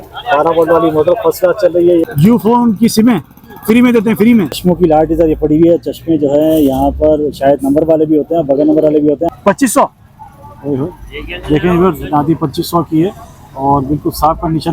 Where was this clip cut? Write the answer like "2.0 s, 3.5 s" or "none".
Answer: 2.0 s, 4.5 s, 9.2 s